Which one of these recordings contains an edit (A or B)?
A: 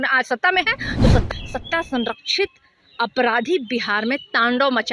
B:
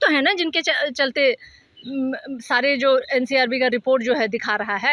A